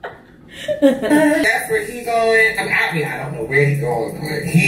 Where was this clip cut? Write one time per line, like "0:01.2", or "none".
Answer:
0:01.4